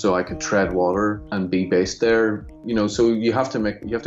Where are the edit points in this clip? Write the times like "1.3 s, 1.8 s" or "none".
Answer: 1.2 s, 2.5 s